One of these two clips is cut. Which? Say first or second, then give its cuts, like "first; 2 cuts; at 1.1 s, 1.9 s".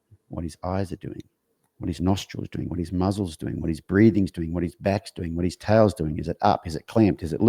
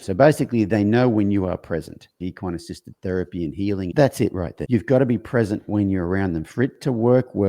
second; 3 cuts; at 2.2 s, 3.9 s, 4.6 s